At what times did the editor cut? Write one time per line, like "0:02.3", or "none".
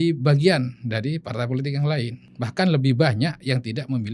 0:02.2